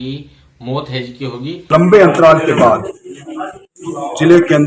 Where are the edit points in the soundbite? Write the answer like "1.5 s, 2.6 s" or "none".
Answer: 1.6 s